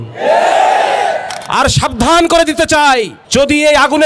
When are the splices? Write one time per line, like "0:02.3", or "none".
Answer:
0:03.2